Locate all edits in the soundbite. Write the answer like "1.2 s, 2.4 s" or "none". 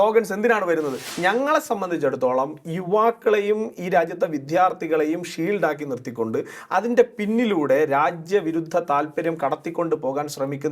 1.0 s